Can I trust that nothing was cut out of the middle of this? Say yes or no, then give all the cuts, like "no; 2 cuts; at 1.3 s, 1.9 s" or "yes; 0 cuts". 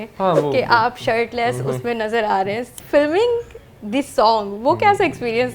no; 1 cut; at 2.7 s